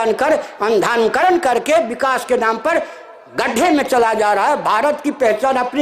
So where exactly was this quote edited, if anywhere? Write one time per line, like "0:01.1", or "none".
none